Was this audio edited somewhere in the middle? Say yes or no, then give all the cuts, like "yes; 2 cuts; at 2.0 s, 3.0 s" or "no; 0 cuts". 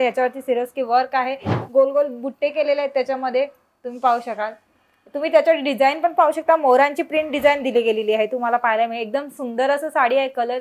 yes; 1 cut; at 1.5 s